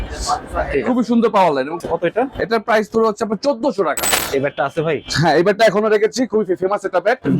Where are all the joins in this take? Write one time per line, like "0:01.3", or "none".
0:01.7
0:04.1